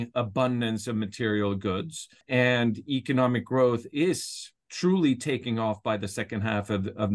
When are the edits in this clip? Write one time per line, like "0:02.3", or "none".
0:02.2